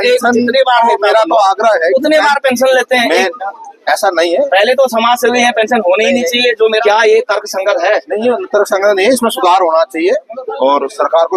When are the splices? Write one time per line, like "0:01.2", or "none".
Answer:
0:06.8